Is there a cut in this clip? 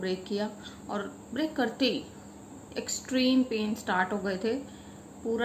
no; 0 cuts

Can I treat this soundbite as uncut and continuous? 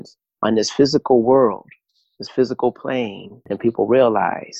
no; 1 cut; at 3.3 s

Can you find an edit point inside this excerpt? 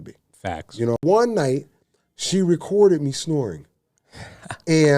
yes; 1 cut; at 1.0 s

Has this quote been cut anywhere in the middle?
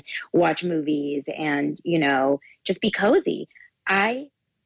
no; 0 cuts

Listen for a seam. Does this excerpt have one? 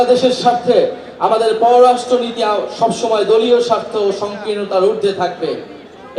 no; 0 cuts

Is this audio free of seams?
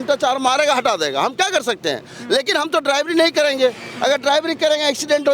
yes; 0 cuts

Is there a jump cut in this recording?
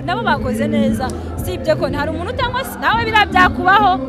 no; 0 cuts

